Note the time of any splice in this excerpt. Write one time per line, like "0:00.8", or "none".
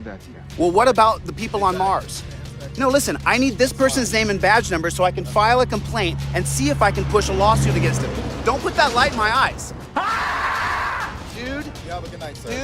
none